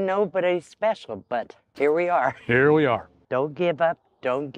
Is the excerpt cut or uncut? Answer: cut